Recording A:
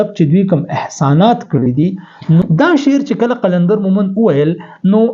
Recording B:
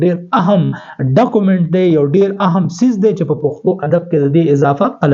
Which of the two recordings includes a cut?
A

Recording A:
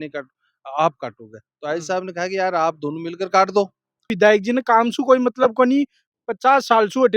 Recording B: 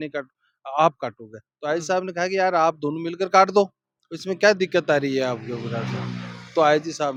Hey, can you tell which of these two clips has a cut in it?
A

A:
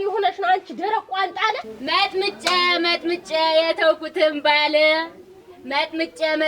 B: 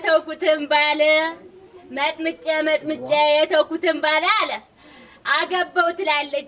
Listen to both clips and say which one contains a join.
A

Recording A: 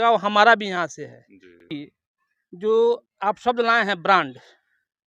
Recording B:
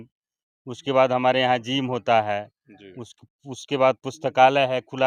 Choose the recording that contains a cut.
A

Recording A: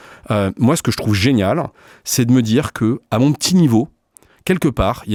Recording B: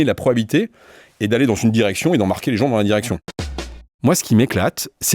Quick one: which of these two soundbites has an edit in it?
B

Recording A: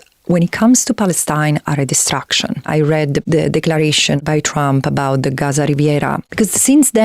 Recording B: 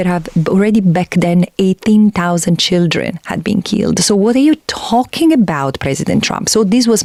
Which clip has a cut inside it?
A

